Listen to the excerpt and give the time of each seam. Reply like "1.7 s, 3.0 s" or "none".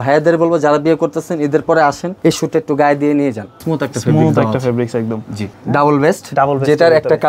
2.1 s, 3.6 s, 5.6 s

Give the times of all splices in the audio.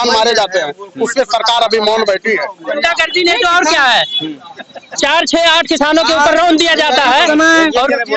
2.6 s

